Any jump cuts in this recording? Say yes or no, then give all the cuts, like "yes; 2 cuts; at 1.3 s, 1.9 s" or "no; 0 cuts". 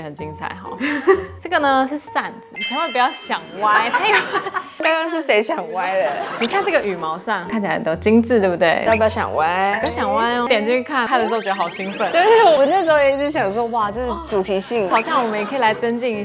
yes; 2 cuts; at 1.3 s, 14.9 s